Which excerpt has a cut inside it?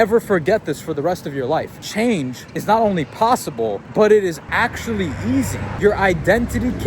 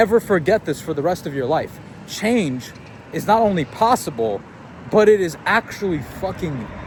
first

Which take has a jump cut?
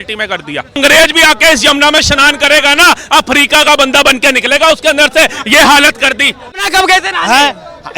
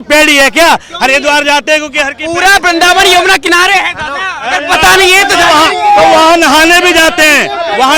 first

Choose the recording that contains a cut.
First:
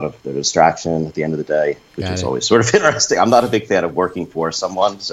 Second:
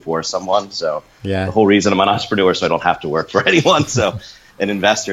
first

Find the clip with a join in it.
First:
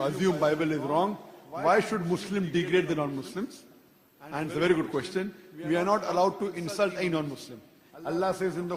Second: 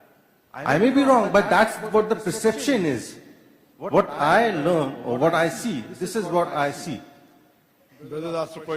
second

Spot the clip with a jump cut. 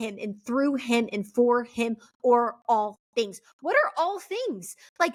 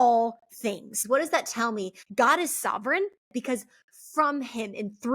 second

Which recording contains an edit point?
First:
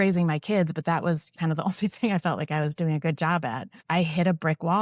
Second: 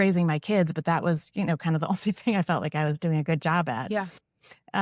first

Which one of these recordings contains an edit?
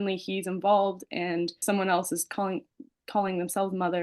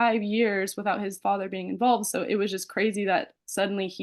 first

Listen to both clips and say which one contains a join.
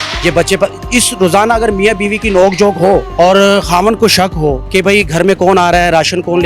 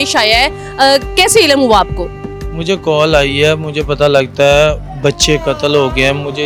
first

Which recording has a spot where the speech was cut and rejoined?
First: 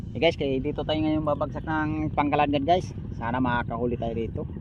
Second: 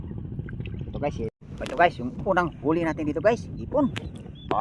second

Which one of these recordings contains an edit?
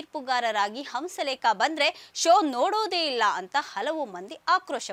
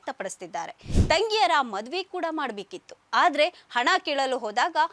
second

